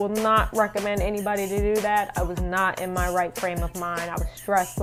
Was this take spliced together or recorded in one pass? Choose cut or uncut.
uncut